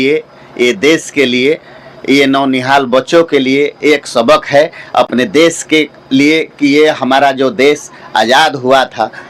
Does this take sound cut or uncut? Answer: uncut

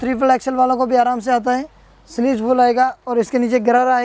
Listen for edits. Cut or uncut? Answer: uncut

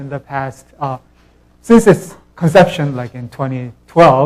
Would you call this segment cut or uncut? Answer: cut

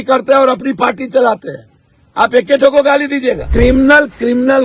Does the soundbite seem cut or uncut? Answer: cut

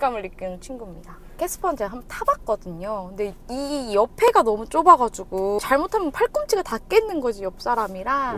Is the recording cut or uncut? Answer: cut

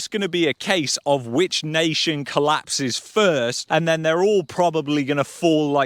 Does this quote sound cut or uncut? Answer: uncut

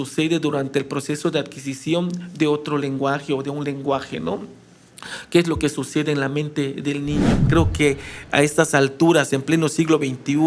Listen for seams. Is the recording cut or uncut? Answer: cut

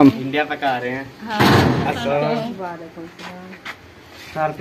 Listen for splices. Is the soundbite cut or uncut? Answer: cut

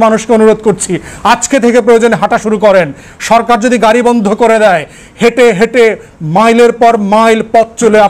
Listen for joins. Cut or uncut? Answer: uncut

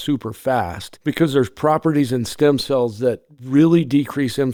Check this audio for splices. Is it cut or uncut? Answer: uncut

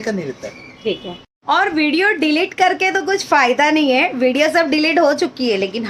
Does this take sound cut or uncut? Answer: uncut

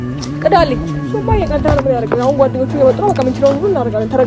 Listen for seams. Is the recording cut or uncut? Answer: uncut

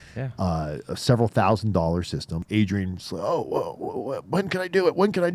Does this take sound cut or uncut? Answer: cut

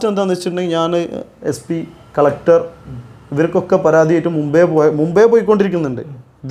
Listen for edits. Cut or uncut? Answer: uncut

